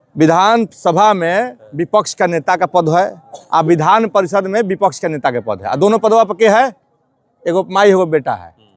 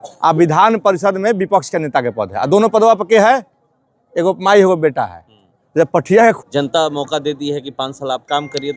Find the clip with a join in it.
second; 1 cut; at 6.4 s

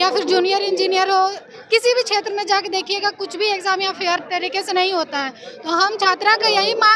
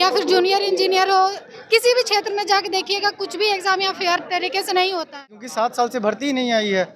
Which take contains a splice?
second; 1 cut; at 5.4 s

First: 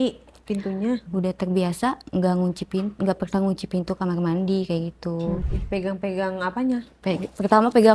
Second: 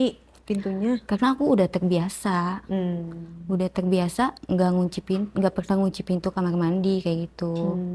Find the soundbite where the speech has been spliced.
first; 2 cuts; at 1.0 s, 5.5 s

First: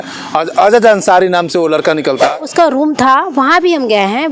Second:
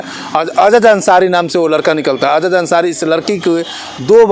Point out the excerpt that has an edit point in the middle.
first; 1 cut; at 2.4 s

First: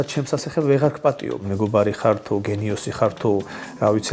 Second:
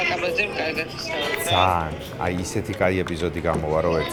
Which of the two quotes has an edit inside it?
first; 1 cut; at 1.4 s

